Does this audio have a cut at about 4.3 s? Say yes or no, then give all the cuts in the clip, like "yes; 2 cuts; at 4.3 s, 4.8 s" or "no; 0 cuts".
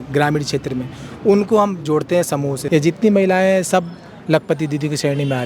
no; 1 cut; at 2.6 s